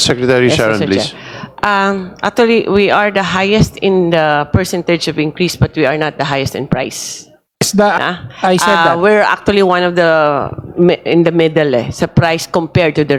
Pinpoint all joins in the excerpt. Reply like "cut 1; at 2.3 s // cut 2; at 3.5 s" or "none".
none